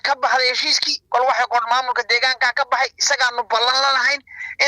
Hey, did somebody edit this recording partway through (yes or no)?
no